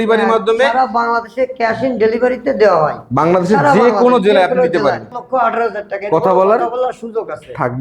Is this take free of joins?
no; 1 cut; at 5.2 s

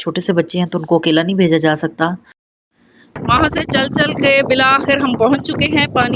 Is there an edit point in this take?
yes; 1 cut; at 3.2 s

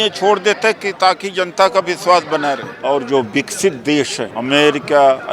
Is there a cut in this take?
yes; 2 cuts; at 2.7 s, 4.2 s

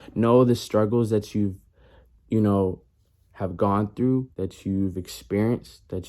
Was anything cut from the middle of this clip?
yes; 1 cut; at 4.3 s

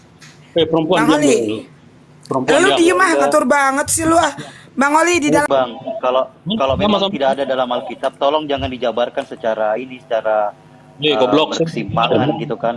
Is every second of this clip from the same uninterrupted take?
no; 1 cut; at 5.5 s

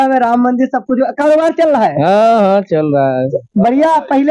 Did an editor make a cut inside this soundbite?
no; 0 cuts

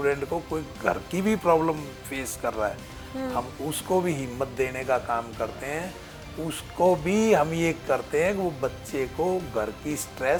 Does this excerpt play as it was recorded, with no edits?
yes; 0 cuts

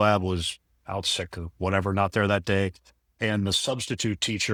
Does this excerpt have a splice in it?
no; 0 cuts

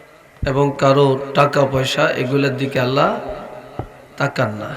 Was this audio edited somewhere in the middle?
no; 0 cuts

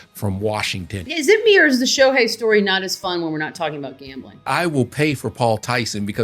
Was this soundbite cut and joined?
yes; 2 cuts; at 1.1 s, 4.5 s

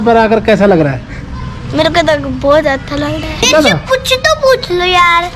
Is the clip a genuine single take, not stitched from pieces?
no; 1 cut; at 3.5 s

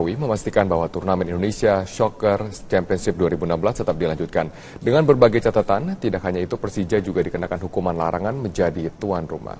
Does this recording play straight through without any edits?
yes; 0 cuts

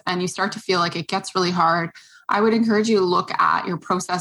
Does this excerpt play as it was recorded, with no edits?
yes; 0 cuts

